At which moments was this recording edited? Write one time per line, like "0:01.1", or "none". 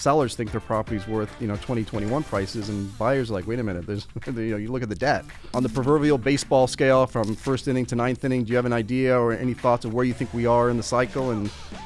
0:05.5

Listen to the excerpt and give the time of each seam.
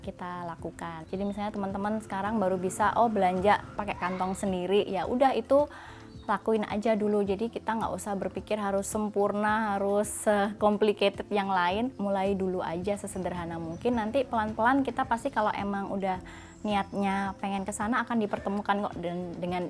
0:01.0
0:03.7
0:11.9

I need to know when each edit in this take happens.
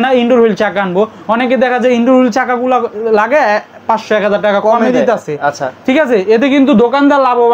none

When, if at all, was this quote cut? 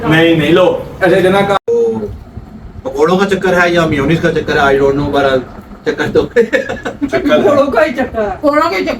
0:01.6

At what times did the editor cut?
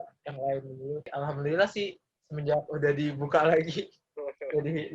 0:01.1

